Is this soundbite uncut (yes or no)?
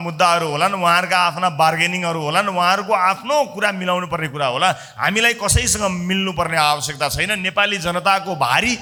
yes